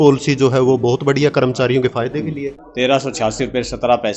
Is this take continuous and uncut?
no; 1 cut; at 2.6 s

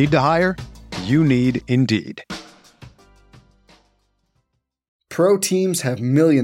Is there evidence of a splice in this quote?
yes; 1 cut; at 5.0 s

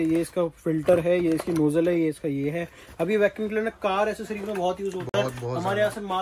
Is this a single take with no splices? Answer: yes; 0 cuts

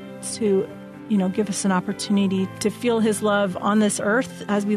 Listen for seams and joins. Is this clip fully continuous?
no; 1 cut; at 2.6 s

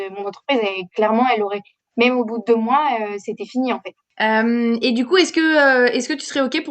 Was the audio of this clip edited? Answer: yes; 1 cut; at 4.1 s

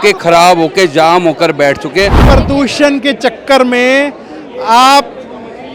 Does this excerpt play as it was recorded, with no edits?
no; 1 cut; at 2.2 s

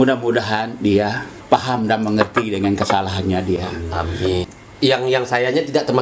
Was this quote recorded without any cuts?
no; 2 cuts; at 1.3 s, 4.4 s

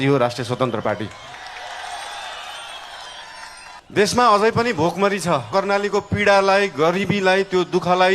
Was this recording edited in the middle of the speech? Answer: yes; 2 cuts; at 3.8 s, 5.5 s

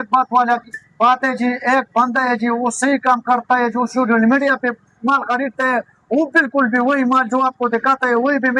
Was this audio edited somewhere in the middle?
no; 0 cuts

